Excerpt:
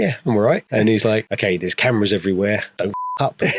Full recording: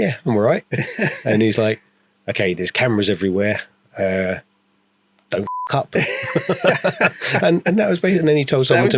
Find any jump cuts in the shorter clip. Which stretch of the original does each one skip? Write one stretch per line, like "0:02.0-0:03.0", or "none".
0:00.9-0:01.8
0:03.6-0:05.2

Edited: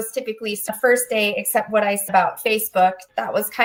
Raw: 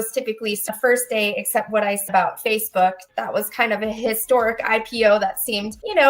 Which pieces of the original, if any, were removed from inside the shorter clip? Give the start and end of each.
none

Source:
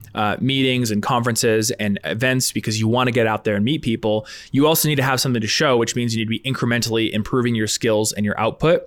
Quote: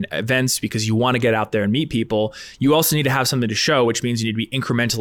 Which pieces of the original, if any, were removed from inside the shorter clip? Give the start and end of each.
none

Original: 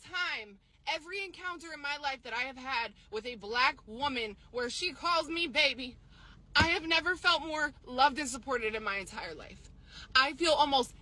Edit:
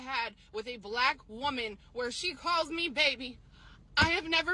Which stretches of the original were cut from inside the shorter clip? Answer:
none

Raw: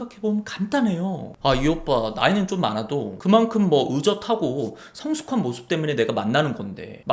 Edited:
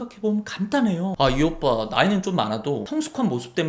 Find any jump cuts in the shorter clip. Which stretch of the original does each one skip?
0:01.1-0:01.4
0:03.1-0:05.0

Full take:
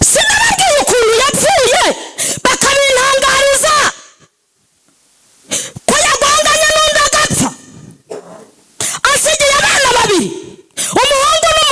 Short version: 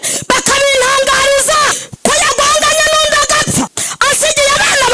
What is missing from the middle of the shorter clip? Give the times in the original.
0:04.0-0:05.7
0:07.7-0:08.9

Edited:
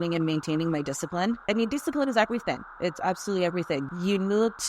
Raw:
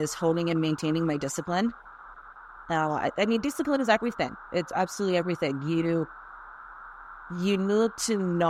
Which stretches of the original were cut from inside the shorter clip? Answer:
0:01.8-0:03.2
0:05.6-0:07.3

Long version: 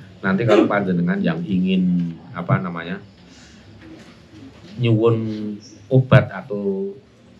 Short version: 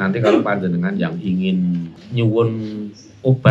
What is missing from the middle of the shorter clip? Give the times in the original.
0:02.2-0:04.6

